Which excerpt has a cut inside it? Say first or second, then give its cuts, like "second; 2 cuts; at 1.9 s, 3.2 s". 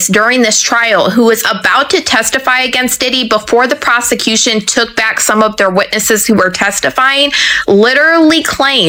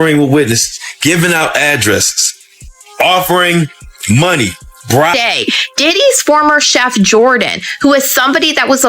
second; 1 cut; at 5.1 s